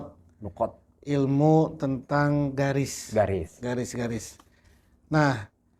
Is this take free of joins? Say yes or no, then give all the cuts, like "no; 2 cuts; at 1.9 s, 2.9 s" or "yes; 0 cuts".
yes; 0 cuts